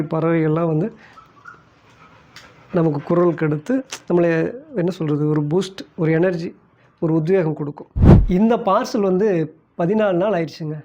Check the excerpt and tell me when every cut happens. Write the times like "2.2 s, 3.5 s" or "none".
8.1 s

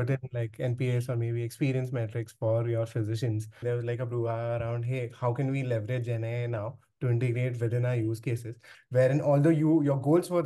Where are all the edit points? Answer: 3.6 s, 8.7 s

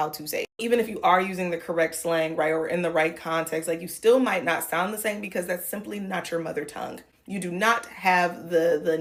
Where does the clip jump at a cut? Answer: none

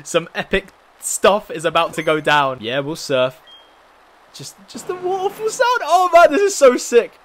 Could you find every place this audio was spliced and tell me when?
2.6 s

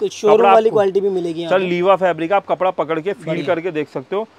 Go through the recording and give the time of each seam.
none

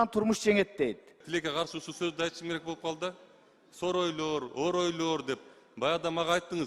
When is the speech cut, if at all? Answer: 1.2 s

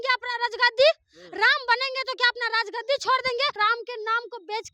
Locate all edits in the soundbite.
3.5 s

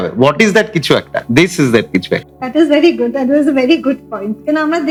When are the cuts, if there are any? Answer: none

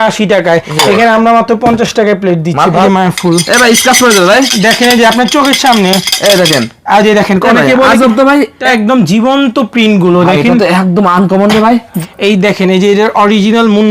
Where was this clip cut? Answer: 2.8 s, 8.6 s, 12.0 s

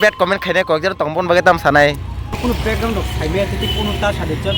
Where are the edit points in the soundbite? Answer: 2.4 s

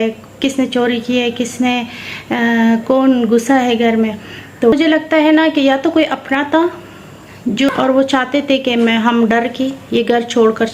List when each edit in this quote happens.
4.7 s, 7.7 s

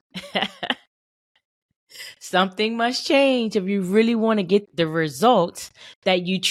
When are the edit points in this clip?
4.7 s

